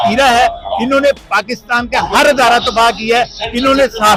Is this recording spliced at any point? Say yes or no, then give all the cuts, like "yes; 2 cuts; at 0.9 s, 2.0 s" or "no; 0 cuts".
no; 0 cuts